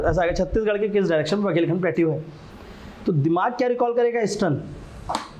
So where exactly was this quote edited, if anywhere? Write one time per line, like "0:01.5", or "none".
none